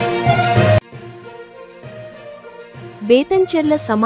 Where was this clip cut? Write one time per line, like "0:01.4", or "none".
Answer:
0:01.0
0:03.0